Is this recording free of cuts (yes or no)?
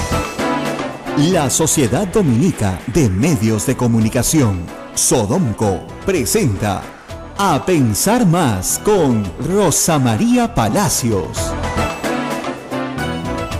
no